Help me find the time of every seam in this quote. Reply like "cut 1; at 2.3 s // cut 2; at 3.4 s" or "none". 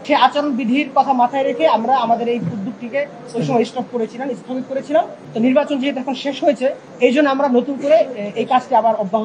cut 1; at 5.2 s // cut 2; at 6.9 s